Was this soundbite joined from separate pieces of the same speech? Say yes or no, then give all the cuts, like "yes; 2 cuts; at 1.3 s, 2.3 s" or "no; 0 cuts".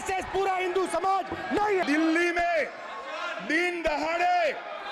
yes; 1 cut; at 1.8 s